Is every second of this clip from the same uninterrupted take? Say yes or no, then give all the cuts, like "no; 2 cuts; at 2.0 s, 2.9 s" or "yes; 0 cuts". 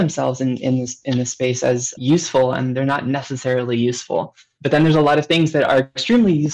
no; 2 cuts; at 1.9 s, 4.4 s